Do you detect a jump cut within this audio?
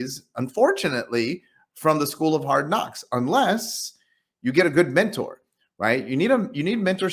no; 0 cuts

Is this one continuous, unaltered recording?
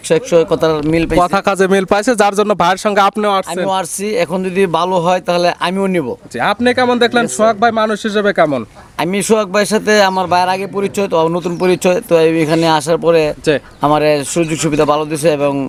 yes; 0 cuts

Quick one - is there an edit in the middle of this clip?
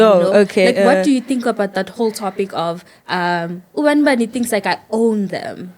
no; 0 cuts

